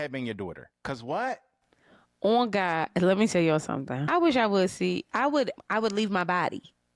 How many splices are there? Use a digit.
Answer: 2